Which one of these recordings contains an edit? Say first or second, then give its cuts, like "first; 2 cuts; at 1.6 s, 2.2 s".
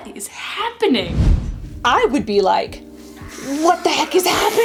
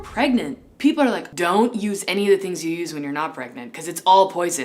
second; 1 cut; at 1.3 s